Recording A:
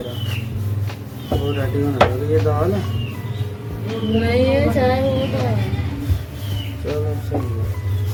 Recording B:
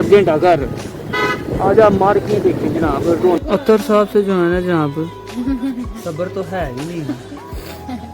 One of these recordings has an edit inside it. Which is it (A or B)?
B